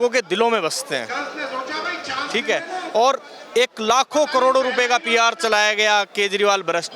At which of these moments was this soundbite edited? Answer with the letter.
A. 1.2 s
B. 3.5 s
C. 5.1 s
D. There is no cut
D